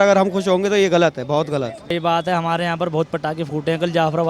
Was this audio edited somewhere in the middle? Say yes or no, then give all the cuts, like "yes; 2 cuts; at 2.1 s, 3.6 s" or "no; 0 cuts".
yes; 1 cut; at 1.9 s